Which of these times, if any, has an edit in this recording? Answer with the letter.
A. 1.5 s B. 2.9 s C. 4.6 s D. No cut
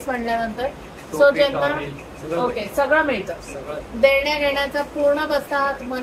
D